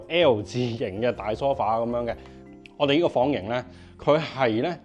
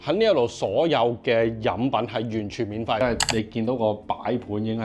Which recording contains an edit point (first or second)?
second